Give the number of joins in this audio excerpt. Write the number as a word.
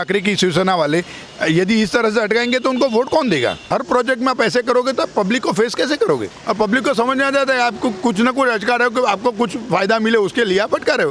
two